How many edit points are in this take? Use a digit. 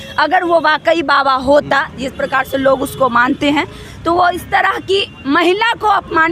0